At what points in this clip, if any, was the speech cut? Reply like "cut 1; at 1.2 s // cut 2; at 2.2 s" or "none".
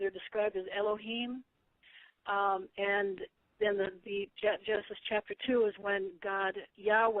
cut 1; at 6.0 s